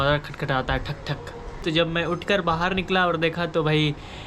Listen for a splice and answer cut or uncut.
cut